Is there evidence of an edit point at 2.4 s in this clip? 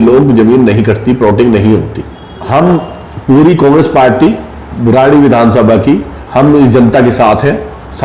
yes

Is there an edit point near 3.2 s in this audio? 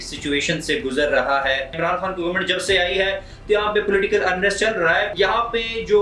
no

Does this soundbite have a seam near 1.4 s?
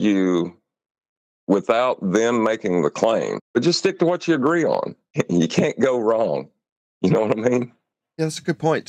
no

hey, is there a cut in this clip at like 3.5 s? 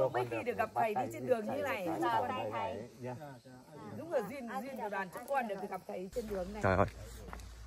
no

